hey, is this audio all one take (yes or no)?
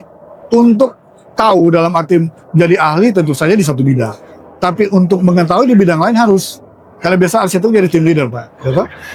yes